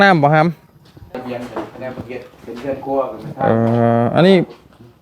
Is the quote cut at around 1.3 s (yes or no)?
yes